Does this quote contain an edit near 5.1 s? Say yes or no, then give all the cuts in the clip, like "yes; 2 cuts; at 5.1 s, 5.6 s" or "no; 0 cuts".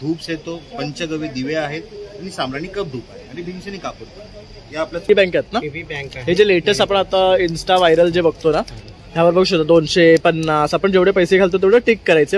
yes; 1 cut; at 5.1 s